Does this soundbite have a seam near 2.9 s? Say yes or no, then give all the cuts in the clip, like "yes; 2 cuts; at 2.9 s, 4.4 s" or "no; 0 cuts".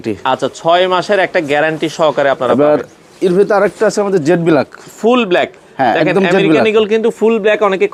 no; 0 cuts